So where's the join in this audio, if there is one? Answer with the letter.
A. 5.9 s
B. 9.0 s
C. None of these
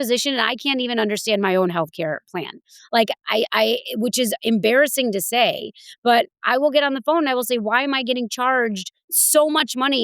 B